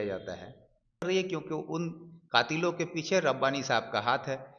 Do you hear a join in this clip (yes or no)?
yes